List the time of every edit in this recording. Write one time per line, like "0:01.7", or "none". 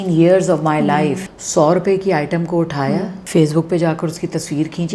0:01.3
0:03.2